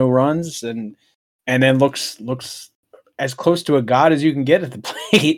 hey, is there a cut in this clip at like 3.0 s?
no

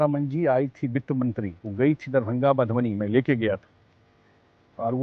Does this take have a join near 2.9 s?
no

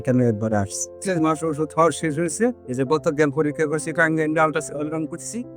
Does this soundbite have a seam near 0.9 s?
yes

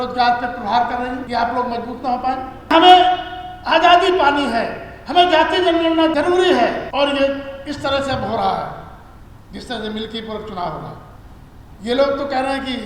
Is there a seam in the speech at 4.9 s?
no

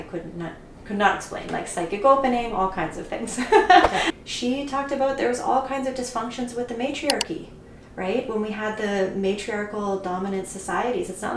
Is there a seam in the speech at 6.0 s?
no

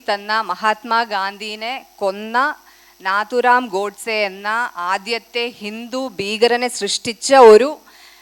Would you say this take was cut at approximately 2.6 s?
no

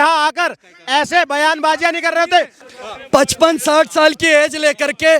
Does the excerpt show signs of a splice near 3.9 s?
no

